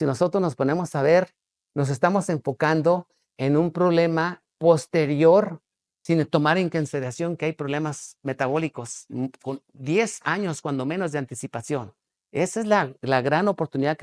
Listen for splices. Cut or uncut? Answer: uncut